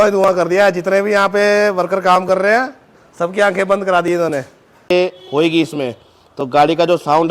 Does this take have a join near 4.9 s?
yes; 1 cut; at 4.9 s

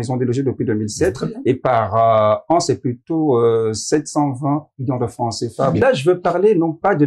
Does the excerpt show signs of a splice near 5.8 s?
yes; 1 cut; at 5.8 s

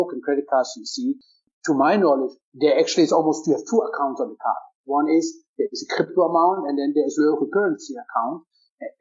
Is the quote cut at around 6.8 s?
no; 2 cuts; at 1.3 s, 2.4 s

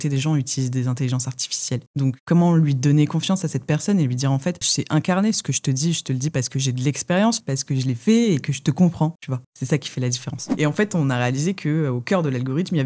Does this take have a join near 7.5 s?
yes; 2 cuts; at 7.5 s, 10.5 s

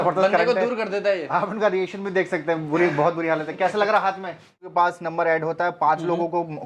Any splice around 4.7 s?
yes; 1 cut; at 4.7 s

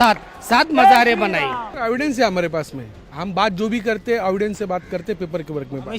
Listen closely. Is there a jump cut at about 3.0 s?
no; 1 cut; at 1.7 s

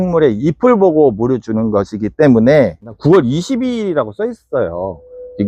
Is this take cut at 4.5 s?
no; 1 cut; at 2.9 s

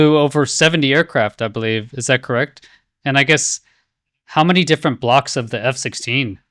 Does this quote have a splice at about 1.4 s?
no; 0 cuts

